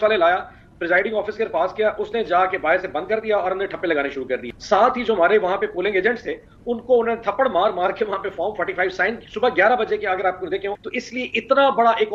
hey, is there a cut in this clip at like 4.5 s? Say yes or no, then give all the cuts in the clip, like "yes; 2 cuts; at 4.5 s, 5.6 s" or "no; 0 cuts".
yes; 2 cuts; at 4.5 s, 10.9 s